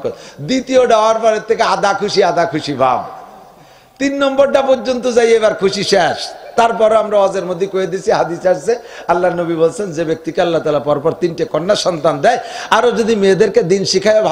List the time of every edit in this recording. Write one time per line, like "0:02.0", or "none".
none